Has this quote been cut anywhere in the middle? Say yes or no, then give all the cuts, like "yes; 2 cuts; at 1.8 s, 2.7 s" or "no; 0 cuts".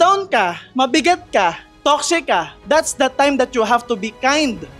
no; 0 cuts